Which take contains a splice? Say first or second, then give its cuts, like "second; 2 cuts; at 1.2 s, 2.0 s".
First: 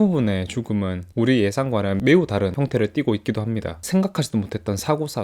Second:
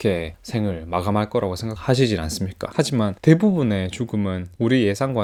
first; 1 cut; at 3.8 s